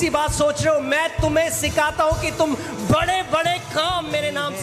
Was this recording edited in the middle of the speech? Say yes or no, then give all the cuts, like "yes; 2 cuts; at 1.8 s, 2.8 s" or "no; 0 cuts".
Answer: no; 0 cuts